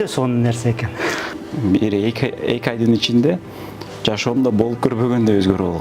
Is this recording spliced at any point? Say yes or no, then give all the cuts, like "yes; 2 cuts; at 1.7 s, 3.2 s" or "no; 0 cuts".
yes; 1 cut; at 1.3 s